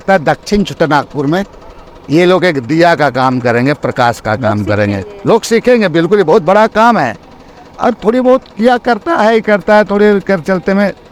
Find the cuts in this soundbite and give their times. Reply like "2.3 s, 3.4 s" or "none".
none